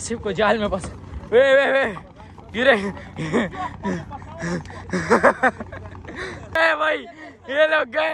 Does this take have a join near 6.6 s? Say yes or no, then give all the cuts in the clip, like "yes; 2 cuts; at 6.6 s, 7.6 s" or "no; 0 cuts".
yes; 1 cut; at 6.6 s